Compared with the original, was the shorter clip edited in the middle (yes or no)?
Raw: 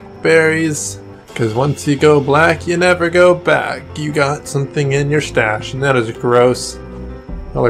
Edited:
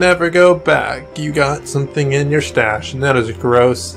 no